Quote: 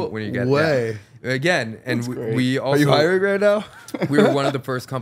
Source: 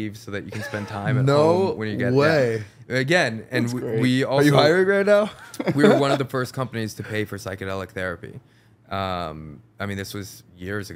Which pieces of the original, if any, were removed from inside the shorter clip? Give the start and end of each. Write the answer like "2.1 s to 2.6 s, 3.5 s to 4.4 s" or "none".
none